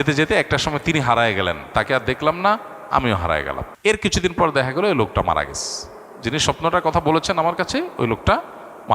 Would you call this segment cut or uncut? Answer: cut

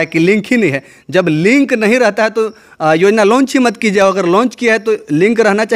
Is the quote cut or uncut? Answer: uncut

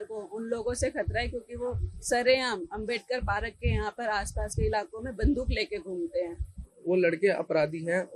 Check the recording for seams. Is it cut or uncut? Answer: cut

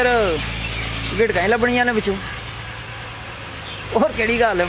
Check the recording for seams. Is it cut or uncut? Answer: uncut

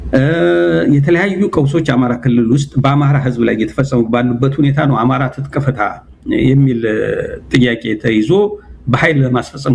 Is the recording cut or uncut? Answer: uncut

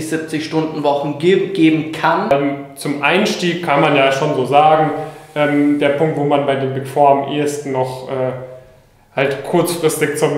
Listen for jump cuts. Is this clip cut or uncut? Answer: cut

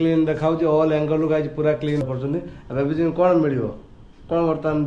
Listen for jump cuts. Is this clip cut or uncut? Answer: cut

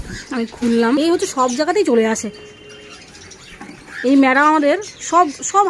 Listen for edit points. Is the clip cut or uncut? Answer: cut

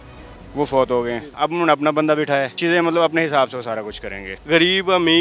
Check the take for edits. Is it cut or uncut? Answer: cut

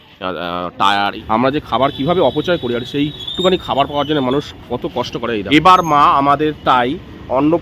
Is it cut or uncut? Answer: cut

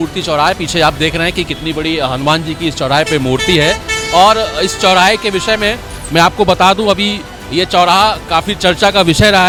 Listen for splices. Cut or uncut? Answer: uncut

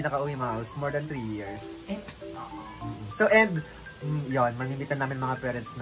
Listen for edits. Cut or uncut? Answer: uncut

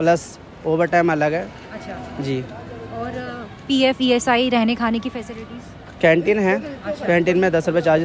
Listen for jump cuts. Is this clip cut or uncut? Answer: uncut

